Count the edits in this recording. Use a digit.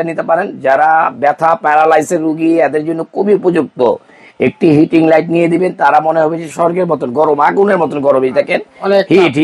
0